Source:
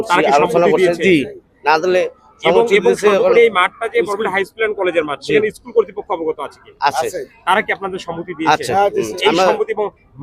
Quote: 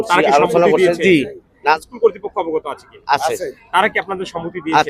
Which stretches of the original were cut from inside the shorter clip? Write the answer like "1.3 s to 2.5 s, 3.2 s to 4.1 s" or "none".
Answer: 1.8 s to 5.5 s